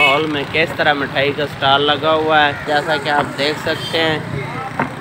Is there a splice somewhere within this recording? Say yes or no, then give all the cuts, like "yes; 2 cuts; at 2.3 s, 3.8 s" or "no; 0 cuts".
yes; 1 cut; at 2.6 s